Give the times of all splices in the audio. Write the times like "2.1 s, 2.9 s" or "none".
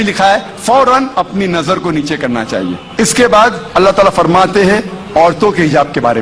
2.8 s, 3.6 s